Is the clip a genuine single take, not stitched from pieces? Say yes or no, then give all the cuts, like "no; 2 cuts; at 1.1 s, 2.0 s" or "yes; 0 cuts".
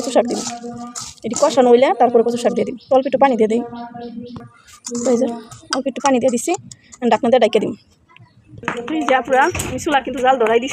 yes; 0 cuts